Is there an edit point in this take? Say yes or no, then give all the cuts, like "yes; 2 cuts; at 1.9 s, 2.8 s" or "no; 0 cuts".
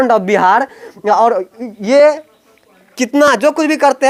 no; 0 cuts